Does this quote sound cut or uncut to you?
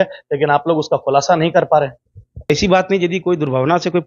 cut